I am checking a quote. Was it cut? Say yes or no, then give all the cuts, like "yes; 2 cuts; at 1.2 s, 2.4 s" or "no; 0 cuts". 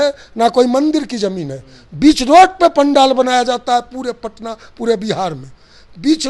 yes; 1 cut; at 1.1 s